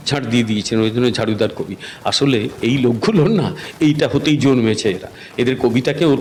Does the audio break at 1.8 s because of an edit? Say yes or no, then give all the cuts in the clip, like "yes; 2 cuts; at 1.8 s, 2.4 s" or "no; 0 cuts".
no; 0 cuts